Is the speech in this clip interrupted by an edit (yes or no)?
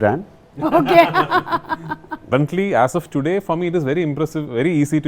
yes